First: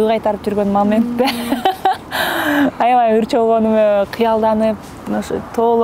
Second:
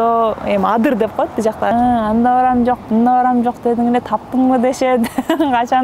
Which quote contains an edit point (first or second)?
second